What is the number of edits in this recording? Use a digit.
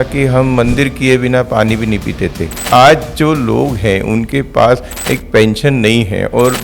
1